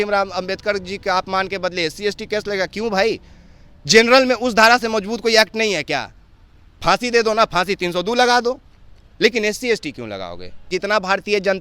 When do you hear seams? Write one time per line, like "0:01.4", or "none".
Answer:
0:10.7